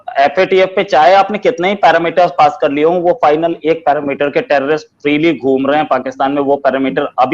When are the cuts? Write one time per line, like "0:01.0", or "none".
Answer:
none